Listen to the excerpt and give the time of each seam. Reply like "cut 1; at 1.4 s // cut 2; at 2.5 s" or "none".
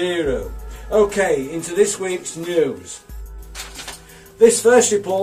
cut 1; at 2.7 s